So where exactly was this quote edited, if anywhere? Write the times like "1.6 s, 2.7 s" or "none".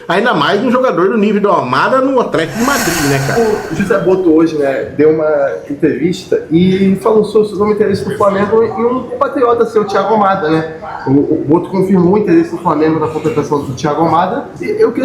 3.4 s